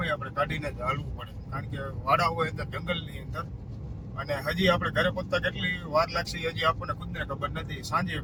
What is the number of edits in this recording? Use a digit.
0